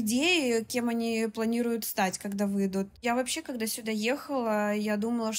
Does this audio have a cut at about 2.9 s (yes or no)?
yes